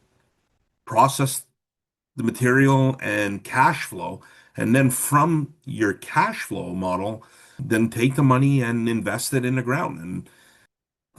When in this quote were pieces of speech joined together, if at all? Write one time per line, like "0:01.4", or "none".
0:07.6